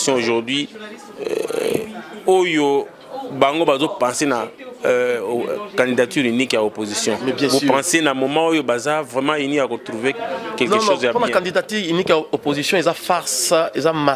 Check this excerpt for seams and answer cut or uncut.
uncut